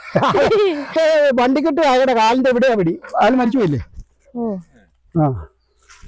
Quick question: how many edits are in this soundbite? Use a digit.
1